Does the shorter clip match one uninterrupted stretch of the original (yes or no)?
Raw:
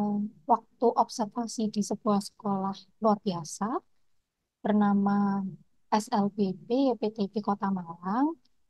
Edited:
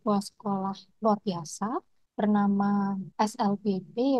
no